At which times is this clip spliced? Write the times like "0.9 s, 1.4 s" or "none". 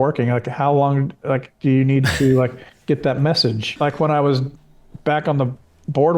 3.6 s